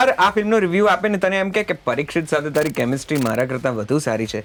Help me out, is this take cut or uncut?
uncut